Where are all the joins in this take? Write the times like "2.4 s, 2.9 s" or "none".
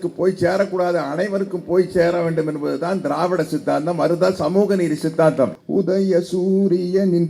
5.6 s